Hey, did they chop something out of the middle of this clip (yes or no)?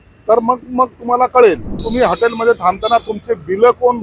yes